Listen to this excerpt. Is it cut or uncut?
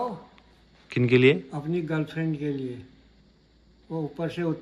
uncut